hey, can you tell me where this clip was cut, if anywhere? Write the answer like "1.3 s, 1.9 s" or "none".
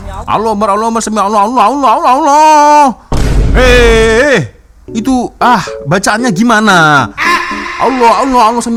none